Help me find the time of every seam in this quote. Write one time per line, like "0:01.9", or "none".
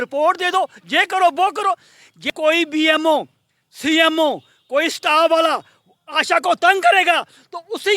0:02.3